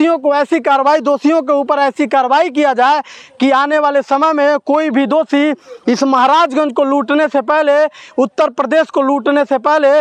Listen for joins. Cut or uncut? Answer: uncut